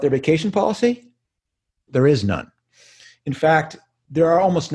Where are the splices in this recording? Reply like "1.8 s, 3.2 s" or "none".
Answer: none